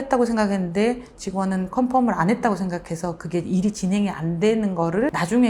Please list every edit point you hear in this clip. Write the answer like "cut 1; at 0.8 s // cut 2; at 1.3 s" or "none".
none